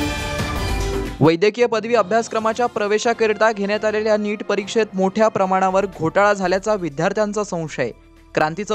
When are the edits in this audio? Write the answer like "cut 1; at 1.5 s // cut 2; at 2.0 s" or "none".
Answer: cut 1; at 1.0 s